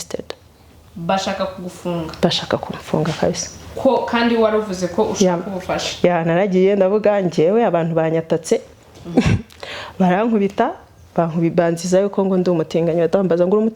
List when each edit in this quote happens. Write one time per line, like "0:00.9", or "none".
none